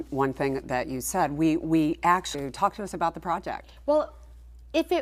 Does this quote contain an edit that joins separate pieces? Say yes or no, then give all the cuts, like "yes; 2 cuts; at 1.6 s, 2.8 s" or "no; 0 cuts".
no; 0 cuts